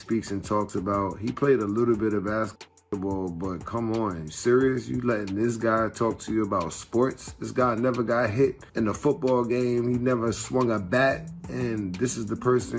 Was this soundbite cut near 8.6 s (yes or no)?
yes